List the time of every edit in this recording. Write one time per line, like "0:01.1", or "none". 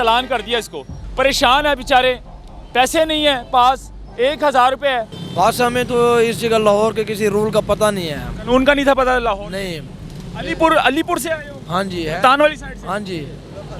0:01.0
0:05.2